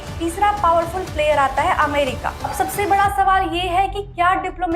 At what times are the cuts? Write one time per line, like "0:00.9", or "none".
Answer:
0:02.3